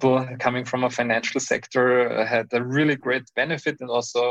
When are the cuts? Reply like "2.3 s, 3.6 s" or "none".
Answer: none